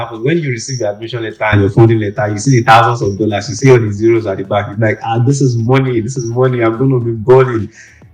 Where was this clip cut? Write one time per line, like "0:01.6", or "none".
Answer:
none

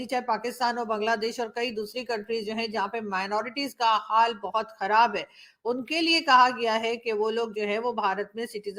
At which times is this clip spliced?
none

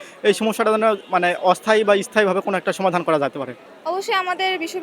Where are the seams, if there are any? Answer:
0:03.6

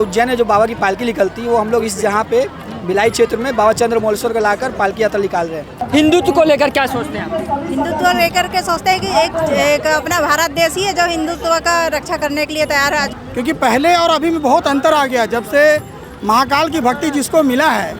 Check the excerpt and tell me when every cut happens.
0:05.7
0:13.1

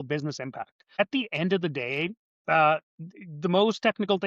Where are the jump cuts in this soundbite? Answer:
0:01.0

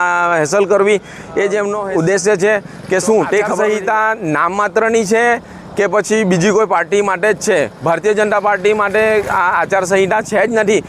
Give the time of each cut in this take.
0:01.8
0:03.5

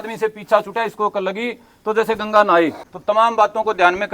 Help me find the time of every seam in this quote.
0:02.9

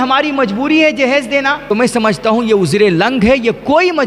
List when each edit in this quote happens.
0:01.6

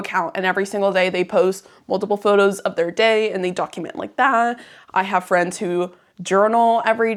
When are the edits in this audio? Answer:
none

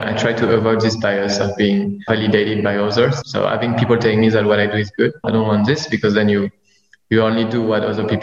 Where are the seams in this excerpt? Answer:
0:02.0
0:03.2
0:05.2

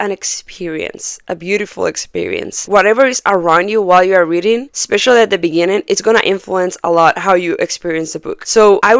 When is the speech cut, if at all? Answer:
none

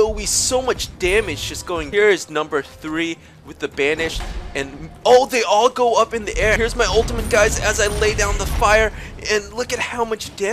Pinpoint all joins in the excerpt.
0:01.9
0:06.6

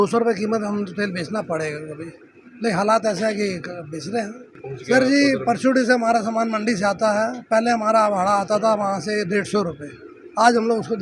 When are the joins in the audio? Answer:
none

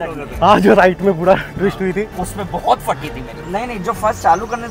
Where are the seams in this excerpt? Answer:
0:03.4

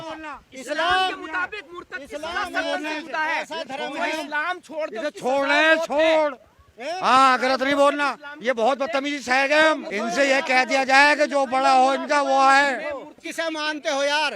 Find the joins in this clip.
0:09.9
0:13.2

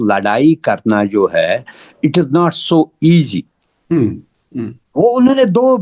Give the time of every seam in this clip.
none

